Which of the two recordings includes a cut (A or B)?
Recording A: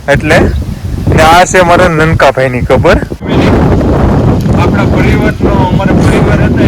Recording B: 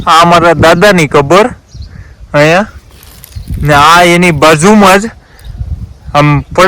A